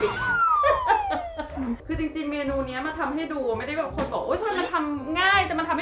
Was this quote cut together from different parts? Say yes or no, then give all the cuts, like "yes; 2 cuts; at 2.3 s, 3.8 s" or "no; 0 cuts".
yes; 1 cut; at 1.8 s